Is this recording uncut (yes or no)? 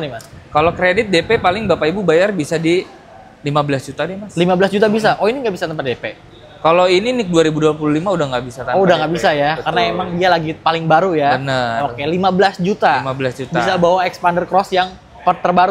yes